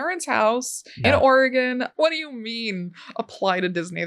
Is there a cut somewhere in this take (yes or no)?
yes